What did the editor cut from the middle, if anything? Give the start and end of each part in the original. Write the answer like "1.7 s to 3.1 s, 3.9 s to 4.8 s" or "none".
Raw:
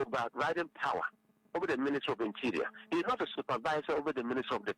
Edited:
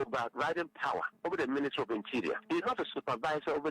1.1 s to 1.4 s, 2.7 s to 2.8 s